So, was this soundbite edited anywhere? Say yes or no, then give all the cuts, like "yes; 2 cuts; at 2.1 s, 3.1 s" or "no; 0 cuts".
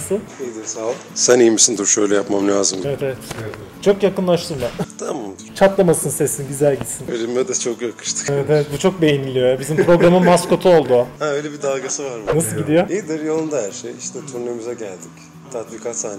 no; 0 cuts